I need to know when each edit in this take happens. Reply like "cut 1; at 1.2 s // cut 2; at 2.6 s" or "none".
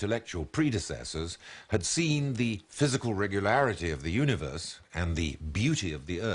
cut 1; at 1.4 s

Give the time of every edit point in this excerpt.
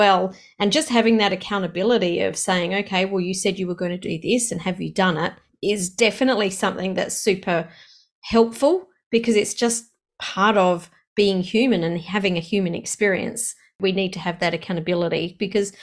cut 1; at 5.4 s // cut 2; at 13.8 s

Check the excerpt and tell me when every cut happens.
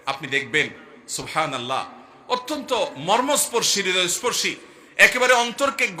none

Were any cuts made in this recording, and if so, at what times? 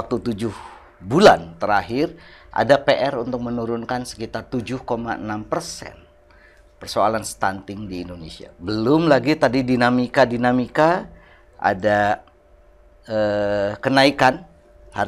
none

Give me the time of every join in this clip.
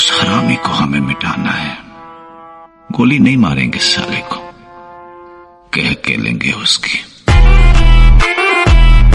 none

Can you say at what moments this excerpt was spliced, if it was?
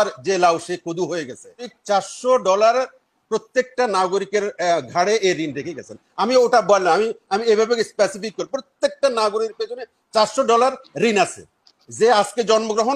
cut 1; at 1.7 s

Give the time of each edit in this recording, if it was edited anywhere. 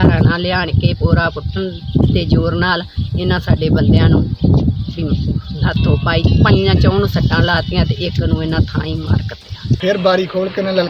cut 1; at 9.8 s

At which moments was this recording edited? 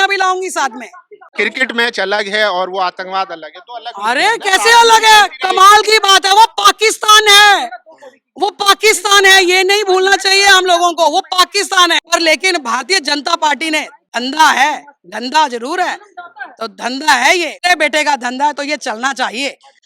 cut 1; at 1.3 s // cut 2; at 12.0 s // cut 3; at 17.6 s

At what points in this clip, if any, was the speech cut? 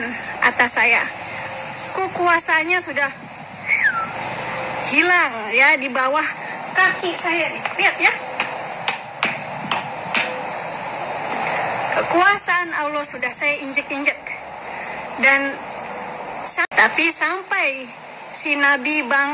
cut 1; at 16.7 s

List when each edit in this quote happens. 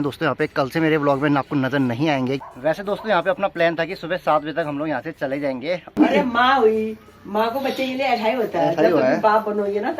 cut 1; at 2.5 s // cut 2; at 5.8 s

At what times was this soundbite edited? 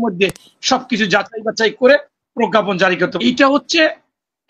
cut 1; at 3.1 s

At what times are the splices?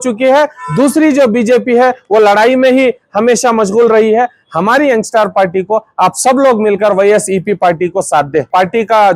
none

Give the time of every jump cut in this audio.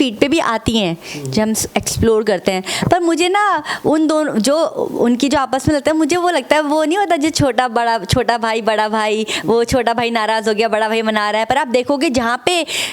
none

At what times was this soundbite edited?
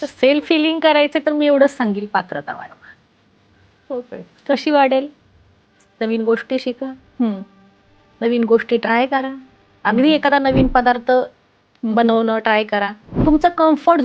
cut 1; at 13.0 s

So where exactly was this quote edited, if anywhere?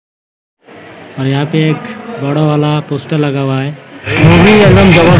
cut 1; at 4.1 s

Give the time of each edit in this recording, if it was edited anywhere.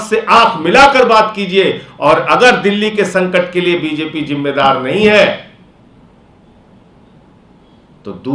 none

